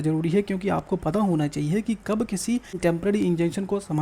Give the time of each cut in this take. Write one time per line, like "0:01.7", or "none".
0:02.7